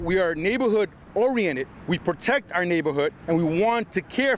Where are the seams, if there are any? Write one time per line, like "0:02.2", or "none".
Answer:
0:01.7
0:03.2